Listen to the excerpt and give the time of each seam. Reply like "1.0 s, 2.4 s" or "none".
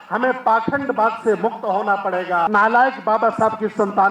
2.5 s

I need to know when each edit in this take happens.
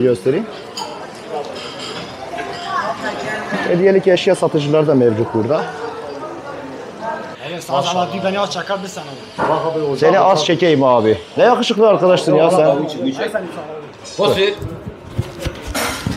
7.3 s

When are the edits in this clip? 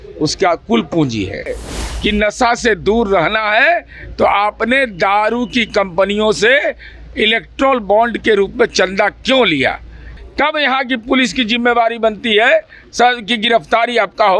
1.6 s, 10.1 s

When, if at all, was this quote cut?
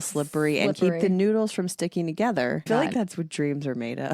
2.7 s

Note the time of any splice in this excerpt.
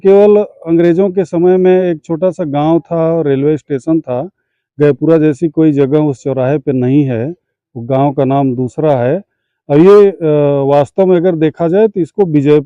none

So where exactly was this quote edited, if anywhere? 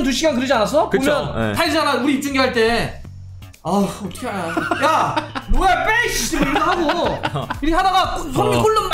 none

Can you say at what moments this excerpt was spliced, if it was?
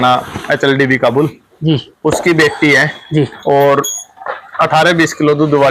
none

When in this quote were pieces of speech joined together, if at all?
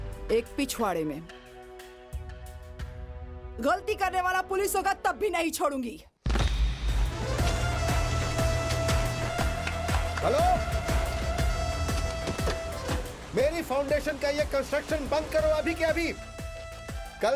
7.1 s

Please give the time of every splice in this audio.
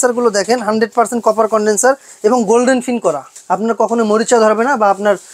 3.3 s

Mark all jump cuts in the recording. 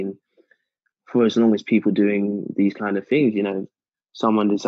none

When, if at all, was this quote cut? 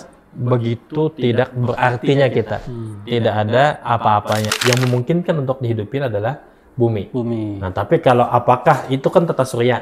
4.6 s

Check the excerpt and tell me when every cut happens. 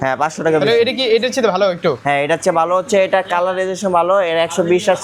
none

